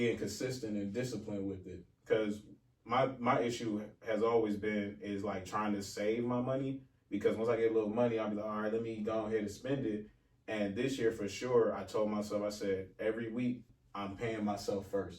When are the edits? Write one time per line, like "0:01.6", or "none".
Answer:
0:13.8

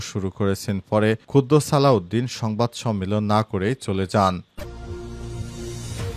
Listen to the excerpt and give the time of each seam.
0:04.5

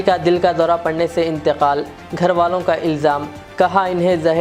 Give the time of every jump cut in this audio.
none

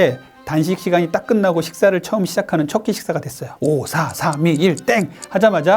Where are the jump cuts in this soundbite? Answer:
0:03.5

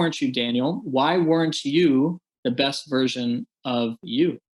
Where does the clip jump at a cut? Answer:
none

